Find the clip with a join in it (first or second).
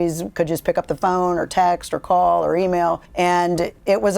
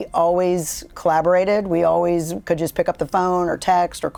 first